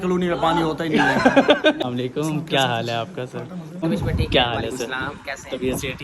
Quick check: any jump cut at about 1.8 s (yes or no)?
yes